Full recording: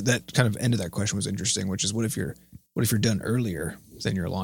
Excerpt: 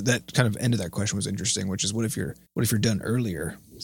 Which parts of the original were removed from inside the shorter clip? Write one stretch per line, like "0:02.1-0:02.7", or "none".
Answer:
0:02.4-0:02.6